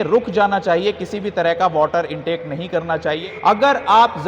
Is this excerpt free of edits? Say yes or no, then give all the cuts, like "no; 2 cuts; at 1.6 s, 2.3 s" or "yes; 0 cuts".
no; 1 cut; at 3.3 s